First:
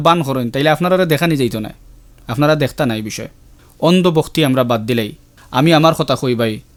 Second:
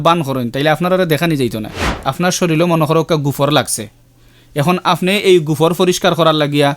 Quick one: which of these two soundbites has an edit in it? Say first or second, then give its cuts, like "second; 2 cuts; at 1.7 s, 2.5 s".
second; 1 cut; at 2.0 s